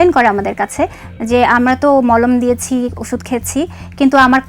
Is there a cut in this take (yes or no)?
no